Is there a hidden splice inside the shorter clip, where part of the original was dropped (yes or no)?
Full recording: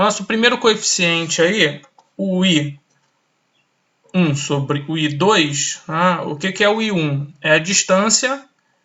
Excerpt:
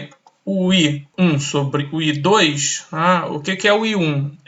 yes